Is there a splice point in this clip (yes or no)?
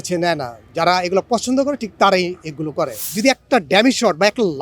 yes